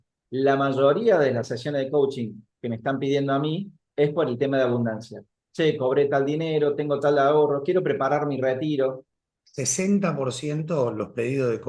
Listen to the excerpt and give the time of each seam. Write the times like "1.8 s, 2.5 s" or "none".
none